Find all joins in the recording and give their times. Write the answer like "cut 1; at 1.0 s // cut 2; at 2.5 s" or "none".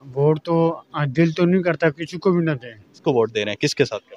cut 1; at 2.9 s